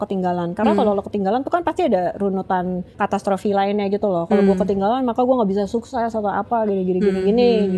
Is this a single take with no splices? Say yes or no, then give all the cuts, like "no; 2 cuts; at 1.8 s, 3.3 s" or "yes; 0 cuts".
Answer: no; 1 cut; at 2.9 s